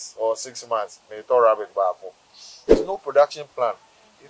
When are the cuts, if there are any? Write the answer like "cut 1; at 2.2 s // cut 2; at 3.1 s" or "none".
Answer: cut 1; at 2.7 s